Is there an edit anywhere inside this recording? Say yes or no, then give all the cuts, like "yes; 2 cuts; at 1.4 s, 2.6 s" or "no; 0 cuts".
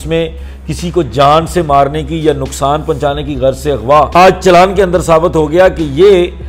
yes; 1 cut; at 4.1 s